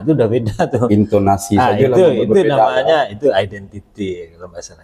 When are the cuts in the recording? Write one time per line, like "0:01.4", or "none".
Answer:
none